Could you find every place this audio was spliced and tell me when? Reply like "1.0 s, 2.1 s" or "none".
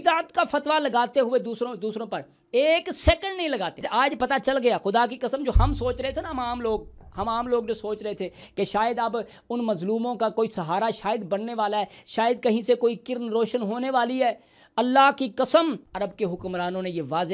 3.8 s